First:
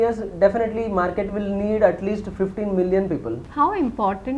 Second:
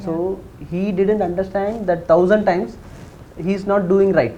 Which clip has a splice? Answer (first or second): first